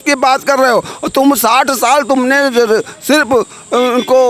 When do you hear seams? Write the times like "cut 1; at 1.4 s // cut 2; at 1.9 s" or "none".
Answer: none